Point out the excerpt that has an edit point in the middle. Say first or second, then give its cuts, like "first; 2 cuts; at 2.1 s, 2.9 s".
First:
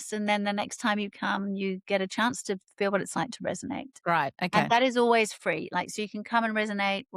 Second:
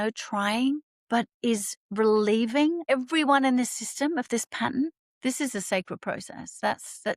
second; 3 cuts; at 0.9 s, 2.9 s, 5.0 s